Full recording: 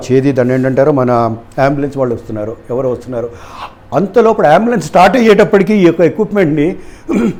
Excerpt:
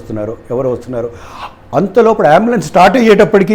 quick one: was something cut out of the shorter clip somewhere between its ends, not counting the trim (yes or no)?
no